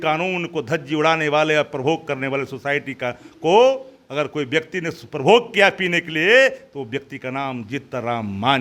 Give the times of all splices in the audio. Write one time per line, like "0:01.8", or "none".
none

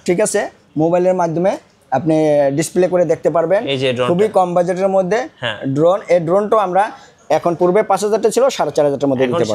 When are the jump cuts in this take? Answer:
none

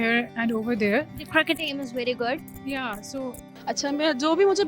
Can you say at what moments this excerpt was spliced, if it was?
0:03.5

